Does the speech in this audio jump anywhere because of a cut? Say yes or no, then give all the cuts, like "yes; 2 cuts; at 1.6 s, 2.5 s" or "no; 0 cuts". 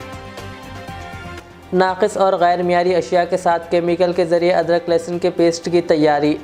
no; 0 cuts